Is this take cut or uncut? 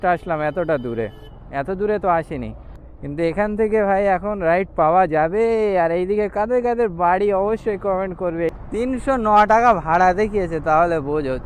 cut